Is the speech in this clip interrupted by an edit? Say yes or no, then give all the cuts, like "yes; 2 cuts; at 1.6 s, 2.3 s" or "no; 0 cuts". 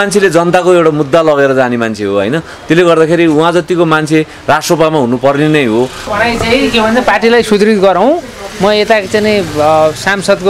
yes; 1 cut; at 6.0 s